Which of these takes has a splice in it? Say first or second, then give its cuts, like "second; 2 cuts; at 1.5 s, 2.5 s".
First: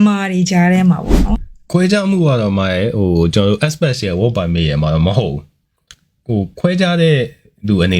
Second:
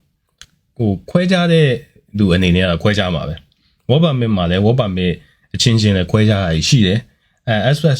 first; 1 cut; at 1.5 s